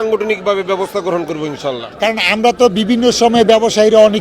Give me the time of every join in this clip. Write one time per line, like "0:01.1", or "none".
0:01.8